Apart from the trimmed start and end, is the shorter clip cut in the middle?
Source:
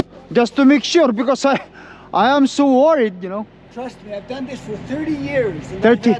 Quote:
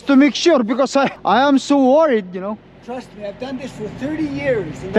yes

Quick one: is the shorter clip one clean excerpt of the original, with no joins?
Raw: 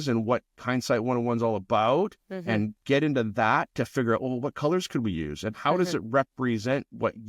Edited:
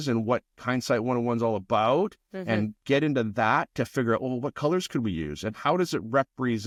yes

